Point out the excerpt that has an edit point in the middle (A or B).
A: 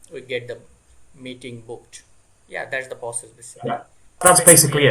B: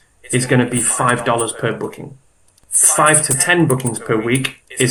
A